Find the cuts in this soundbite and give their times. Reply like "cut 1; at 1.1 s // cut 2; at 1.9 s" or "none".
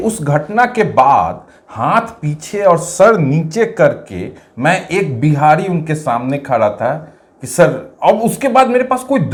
none